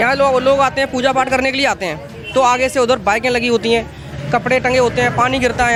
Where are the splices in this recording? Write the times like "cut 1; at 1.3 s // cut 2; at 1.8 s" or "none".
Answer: none